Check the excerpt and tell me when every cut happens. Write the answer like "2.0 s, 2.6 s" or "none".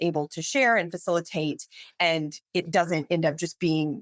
none